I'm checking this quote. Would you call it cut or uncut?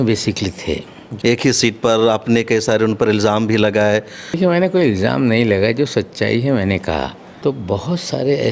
cut